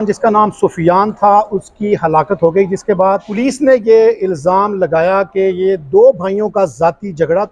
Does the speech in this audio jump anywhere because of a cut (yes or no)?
yes